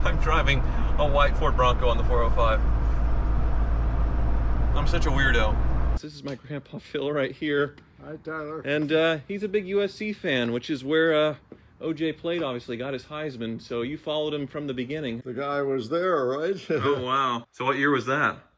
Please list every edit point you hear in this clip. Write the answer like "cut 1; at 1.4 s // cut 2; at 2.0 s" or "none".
cut 1; at 5.9 s // cut 2; at 15.2 s // cut 3; at 17.4 s